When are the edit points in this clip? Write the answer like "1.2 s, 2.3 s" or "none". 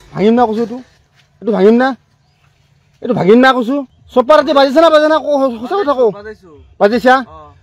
4.0 s